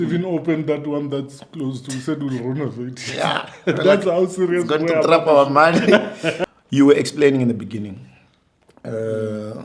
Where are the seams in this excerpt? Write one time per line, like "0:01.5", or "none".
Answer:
0:06.4